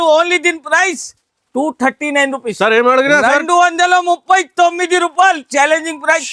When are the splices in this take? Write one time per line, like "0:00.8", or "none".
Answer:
none

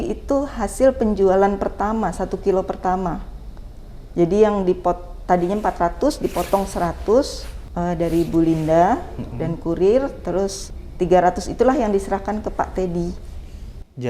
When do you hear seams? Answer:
none

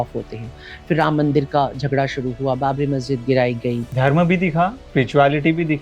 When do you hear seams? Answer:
0:03.9
0:04.8

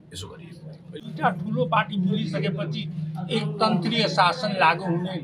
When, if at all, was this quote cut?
0:01.1

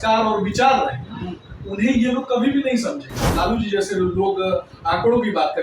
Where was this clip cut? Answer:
0:03.3

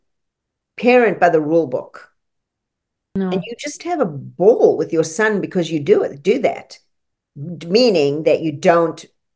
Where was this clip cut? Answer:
0:03.2

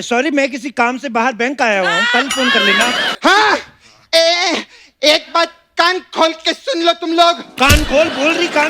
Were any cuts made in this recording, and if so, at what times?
0:03.1

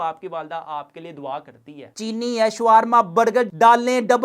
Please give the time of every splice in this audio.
0:01.8

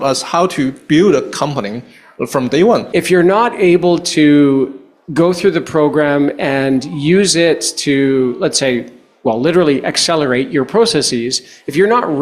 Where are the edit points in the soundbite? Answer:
0:02.9

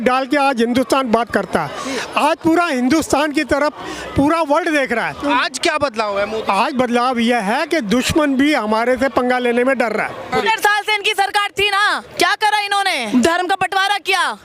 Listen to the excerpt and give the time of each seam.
0:05.2
0:10.4
0:12.1
0:13.0

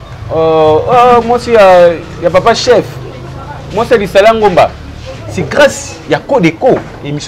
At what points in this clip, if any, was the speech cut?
none

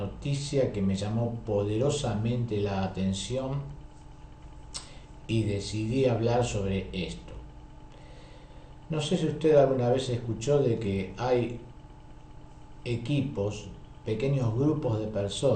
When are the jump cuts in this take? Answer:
0:10.1

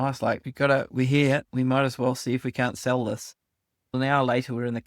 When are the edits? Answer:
0:03.9

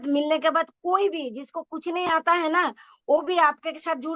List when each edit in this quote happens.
none

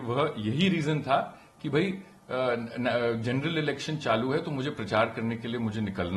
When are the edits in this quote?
none

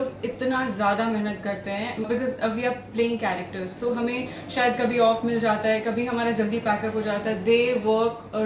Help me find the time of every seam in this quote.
none

